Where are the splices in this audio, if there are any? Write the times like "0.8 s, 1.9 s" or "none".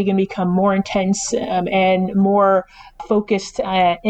3.0 s

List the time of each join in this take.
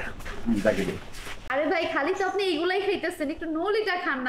1.4 s

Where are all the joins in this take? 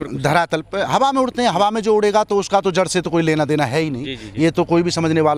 none

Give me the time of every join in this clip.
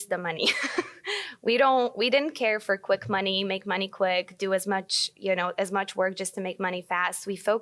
none

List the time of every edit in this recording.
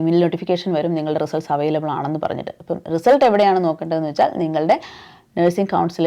none

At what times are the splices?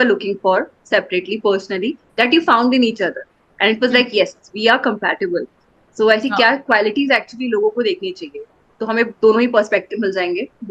none

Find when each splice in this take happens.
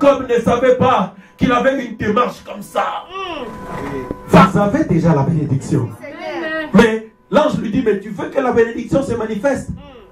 4.4 s

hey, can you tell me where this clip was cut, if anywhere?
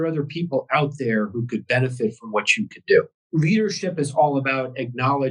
3.2 s

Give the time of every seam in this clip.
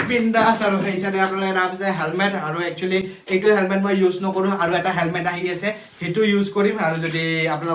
none

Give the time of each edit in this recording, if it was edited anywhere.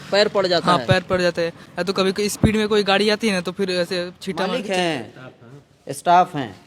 4.4 s

